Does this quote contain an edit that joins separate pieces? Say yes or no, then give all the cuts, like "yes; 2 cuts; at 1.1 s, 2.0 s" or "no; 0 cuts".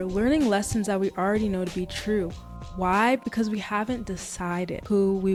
no; 0 cuts